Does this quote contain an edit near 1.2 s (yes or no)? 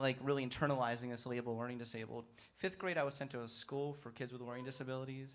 yes